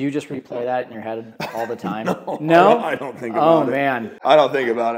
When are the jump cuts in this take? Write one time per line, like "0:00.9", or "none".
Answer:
0:04.1